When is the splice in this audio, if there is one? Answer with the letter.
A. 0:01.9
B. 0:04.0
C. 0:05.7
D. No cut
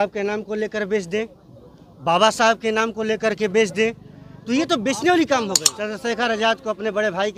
C